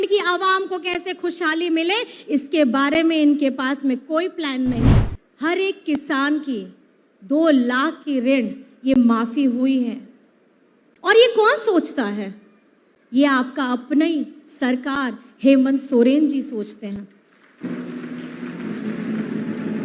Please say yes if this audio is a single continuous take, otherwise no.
no